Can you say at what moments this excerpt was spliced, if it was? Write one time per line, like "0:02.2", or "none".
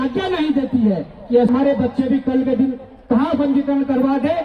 0:01.5

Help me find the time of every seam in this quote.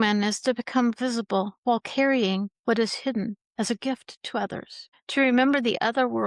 none

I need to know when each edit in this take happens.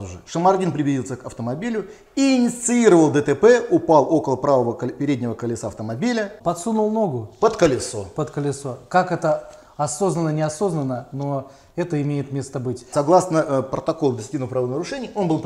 0:06.3
0:12.9

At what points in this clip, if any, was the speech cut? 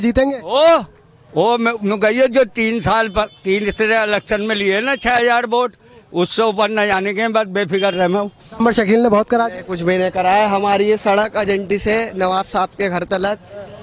0:08.6

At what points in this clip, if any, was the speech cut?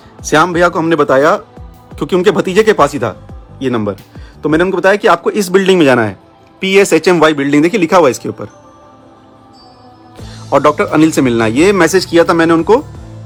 none

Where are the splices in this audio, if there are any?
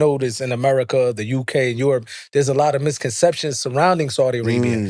none

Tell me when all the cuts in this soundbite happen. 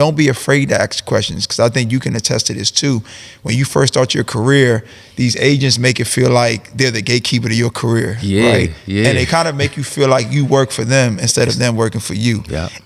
none

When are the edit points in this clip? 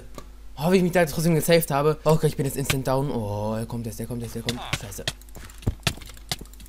0:02.0

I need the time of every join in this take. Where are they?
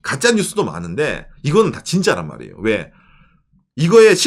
none

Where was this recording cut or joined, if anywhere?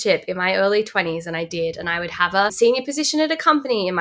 0:02.5

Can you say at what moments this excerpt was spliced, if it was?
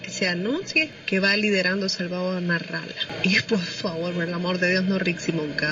0:01.0

